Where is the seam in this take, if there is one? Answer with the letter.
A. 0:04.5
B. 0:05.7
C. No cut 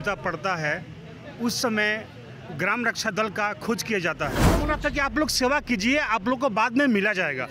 A